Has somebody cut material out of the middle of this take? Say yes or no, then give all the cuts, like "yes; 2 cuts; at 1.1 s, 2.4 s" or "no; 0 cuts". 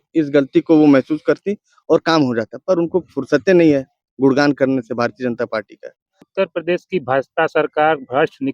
yes; 1 cut; at 6.3 s